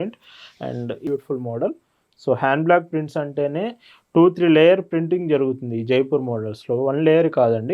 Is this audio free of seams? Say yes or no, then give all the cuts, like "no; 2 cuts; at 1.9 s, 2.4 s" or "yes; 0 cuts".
no; 1 cut; at 1.1 s